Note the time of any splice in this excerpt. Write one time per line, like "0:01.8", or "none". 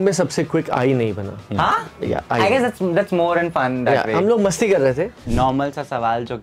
0:05.2